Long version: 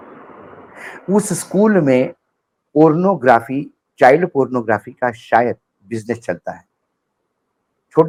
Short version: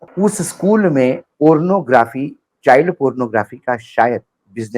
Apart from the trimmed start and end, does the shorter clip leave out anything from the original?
yes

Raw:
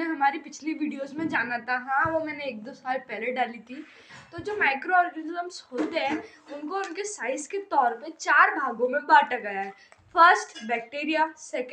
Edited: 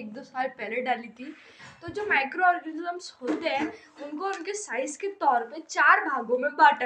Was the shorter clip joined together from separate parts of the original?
no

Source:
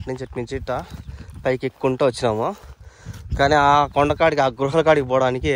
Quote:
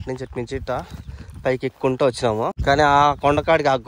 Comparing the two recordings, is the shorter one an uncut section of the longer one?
no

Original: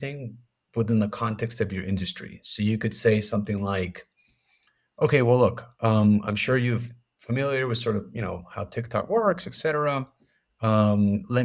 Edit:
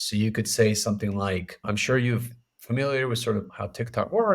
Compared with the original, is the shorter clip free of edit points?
no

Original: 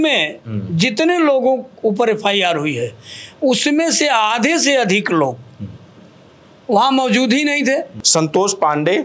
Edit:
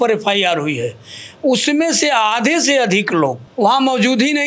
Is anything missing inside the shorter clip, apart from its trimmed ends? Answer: yes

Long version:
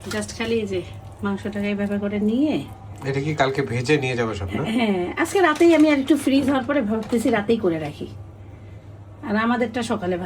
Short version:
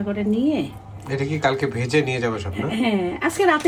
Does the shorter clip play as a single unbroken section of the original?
yes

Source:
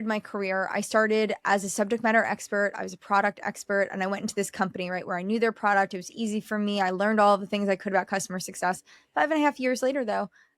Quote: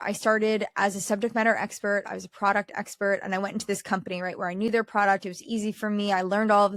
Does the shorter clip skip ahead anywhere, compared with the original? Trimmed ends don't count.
no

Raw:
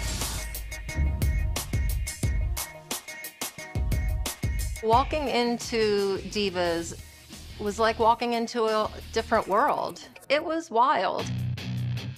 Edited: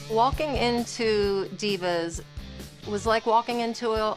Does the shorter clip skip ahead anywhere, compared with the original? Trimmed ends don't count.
no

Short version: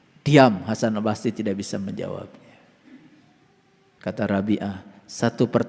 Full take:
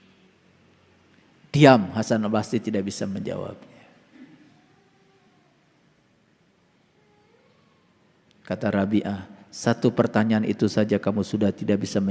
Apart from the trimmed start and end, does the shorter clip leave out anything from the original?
yes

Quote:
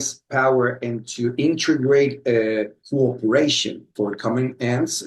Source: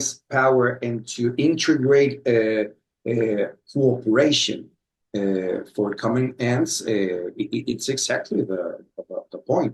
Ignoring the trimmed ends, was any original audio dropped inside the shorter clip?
yes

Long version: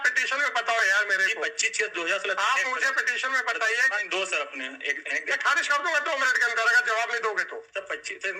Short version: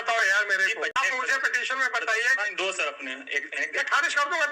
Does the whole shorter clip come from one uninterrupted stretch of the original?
no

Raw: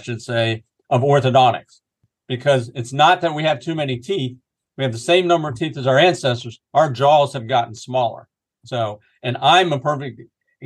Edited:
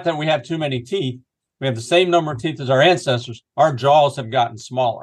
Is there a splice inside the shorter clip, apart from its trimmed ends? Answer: no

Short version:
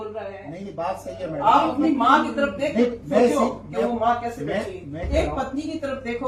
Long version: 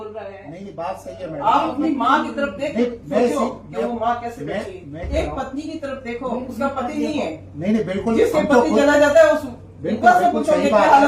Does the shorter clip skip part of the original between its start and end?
no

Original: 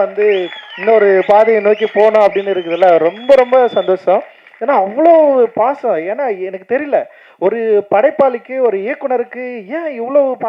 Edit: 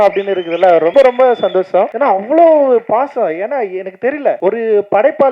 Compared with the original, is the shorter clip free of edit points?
no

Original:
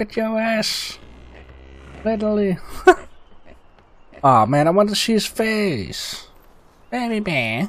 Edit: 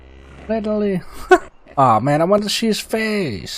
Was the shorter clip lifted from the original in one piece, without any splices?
no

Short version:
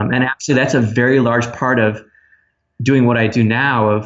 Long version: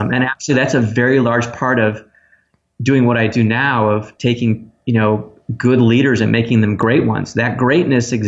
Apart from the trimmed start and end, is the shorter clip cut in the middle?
no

